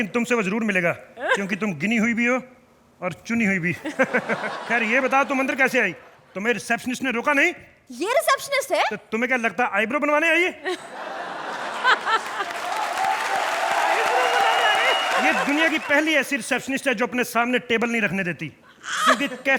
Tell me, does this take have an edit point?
no; 0 cuts

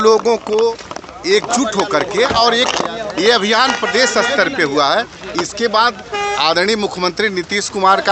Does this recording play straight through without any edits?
yes; 0 cuts

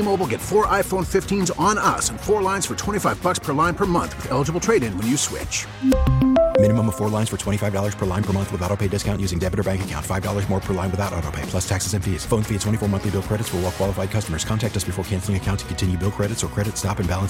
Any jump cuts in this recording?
no; 0 cuts

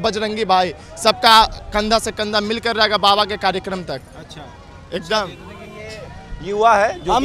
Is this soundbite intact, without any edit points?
yes; 0 cuts

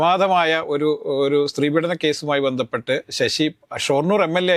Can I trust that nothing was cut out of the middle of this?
yes; 0 cuts

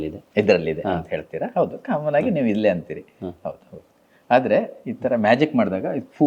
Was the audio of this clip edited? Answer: no; 0 cuts

